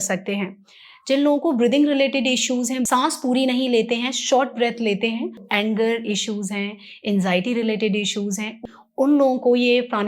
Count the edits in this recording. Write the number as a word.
two